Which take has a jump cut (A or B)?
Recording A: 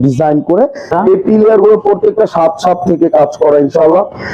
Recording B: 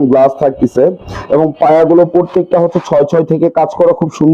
A